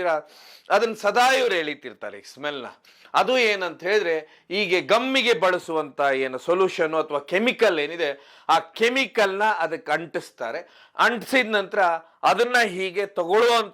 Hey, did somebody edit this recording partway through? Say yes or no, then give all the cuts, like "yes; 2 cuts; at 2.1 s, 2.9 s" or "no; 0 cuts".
no; 0 cuts